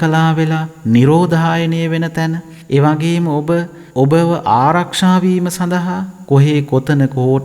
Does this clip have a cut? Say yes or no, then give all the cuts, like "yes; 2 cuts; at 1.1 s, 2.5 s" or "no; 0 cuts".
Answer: yes; 2 cuts; at 2.5 s, 3.8 s